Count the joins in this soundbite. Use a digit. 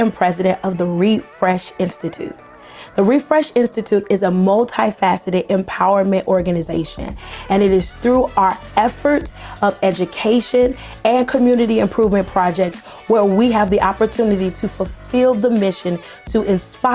1